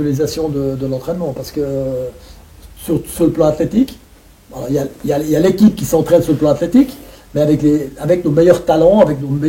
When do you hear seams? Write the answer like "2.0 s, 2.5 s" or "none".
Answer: none